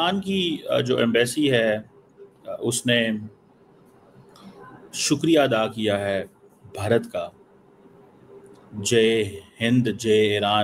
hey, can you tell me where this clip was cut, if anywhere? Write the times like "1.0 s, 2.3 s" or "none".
none